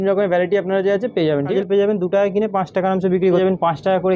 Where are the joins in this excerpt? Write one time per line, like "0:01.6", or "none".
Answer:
0:01.5
0:03.4